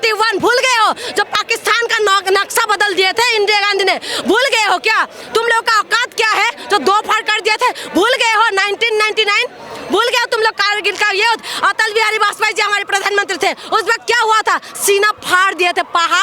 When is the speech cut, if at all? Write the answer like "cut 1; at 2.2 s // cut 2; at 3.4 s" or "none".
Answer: none